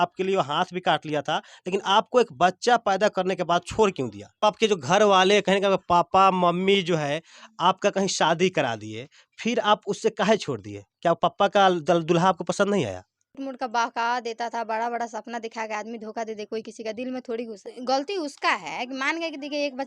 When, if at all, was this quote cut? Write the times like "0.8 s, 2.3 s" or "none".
4.4 s, 13.4 s, 17.7 s